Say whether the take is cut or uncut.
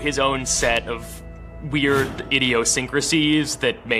uncut